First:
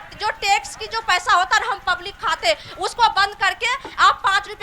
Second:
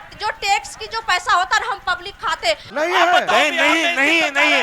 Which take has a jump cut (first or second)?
second